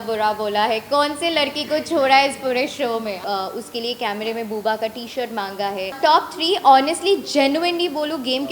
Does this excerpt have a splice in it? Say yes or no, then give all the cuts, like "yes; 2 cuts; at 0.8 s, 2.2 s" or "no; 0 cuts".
yes; 2 cuts; at 3.2 s, 5.9 s